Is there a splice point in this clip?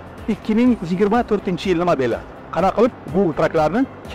no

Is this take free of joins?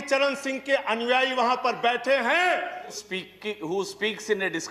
no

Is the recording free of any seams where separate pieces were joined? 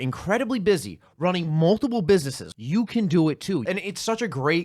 no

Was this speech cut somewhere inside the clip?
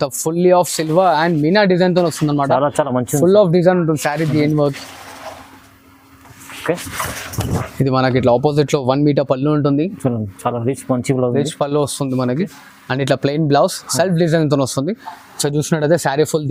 no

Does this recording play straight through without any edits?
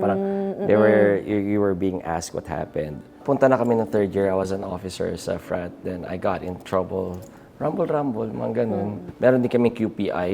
no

